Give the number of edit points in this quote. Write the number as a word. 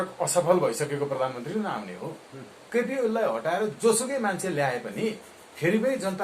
one